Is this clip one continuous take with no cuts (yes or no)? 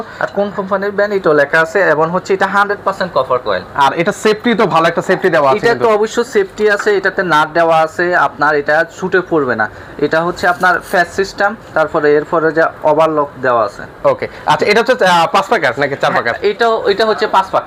yes